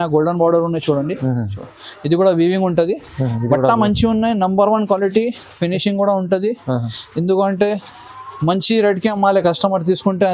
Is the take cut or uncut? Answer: uncut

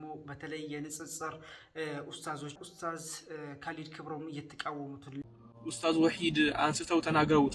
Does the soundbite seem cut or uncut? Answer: cut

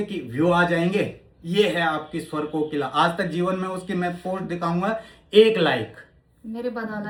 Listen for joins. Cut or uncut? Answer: uncut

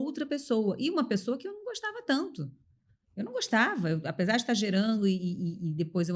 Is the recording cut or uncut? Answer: uncut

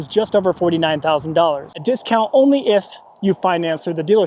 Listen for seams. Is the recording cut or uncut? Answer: cut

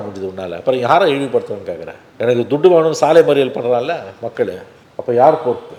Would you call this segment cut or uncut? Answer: uncut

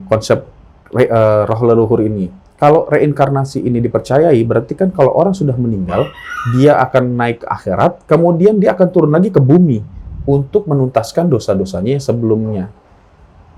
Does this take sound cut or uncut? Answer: uncut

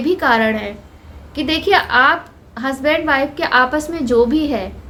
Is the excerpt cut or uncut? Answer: uncut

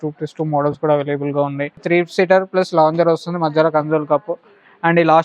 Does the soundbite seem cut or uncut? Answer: cut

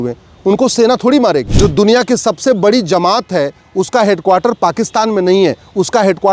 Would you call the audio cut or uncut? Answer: cut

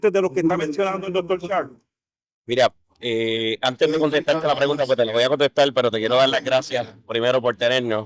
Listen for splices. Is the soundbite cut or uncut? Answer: uncut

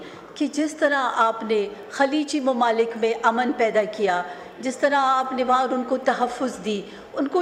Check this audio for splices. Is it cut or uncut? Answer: uncut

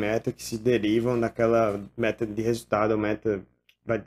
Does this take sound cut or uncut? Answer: uncut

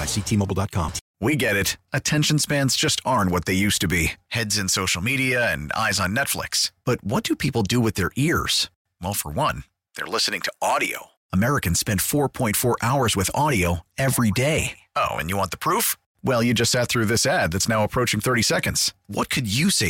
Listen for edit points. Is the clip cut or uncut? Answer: cut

